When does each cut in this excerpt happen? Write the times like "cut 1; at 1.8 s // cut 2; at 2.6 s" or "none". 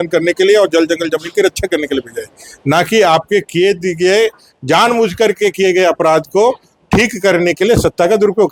none